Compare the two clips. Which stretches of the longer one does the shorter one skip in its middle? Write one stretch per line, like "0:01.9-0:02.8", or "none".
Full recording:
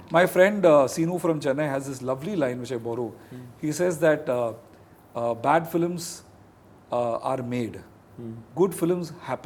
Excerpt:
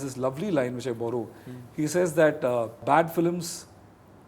0:04.7-0:05.4